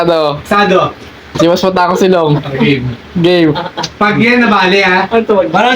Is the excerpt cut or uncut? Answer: cut